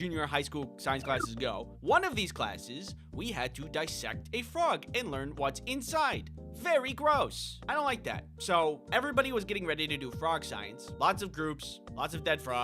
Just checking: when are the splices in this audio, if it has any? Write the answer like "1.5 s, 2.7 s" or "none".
1.6 s